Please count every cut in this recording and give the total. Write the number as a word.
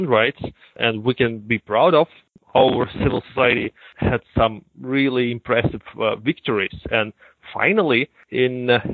one